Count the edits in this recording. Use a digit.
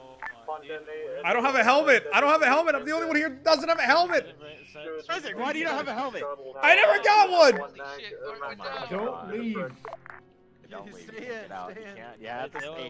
0